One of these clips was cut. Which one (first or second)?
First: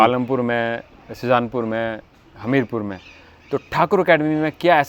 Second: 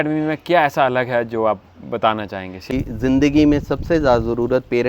second